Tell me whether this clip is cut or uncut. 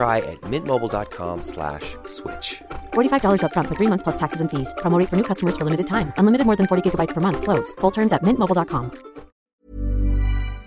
cut